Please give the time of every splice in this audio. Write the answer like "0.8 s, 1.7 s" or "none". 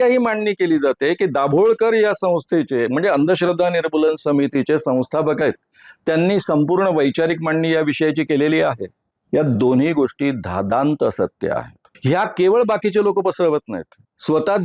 none